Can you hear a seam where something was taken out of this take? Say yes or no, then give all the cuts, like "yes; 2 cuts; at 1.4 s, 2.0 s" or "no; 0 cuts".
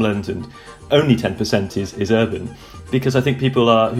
no; 0 cuts